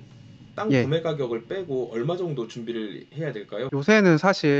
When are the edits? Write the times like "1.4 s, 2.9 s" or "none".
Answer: 3.7 s